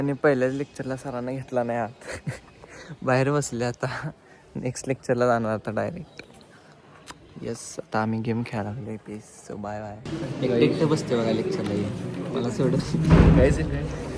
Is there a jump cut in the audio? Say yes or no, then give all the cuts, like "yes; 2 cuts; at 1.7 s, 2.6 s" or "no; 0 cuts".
no; 0 cuts